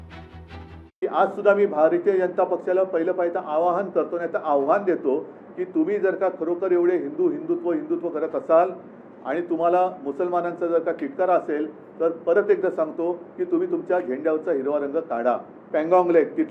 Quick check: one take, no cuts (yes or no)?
no